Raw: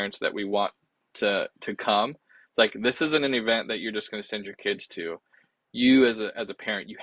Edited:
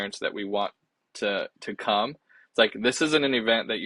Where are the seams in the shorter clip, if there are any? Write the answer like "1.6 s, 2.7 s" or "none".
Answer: none